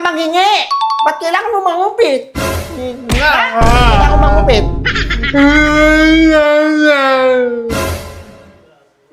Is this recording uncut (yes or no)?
yes